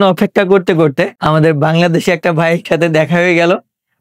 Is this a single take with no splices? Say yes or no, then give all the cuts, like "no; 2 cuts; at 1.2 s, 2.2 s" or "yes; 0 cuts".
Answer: no; 1 cut; at 1.2 s